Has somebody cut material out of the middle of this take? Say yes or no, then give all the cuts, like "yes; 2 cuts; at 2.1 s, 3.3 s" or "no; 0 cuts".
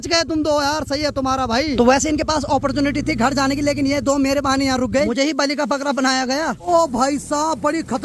yes; 3 cuts; at 1.7 s, 5.1 s, 6.7 s